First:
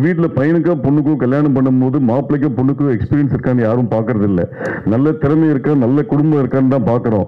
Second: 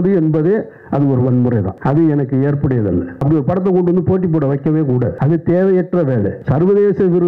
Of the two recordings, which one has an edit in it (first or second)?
second